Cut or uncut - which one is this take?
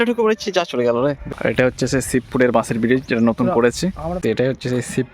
cut